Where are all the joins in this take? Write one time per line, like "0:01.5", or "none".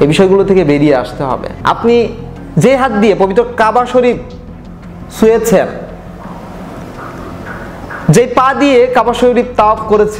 0:01.5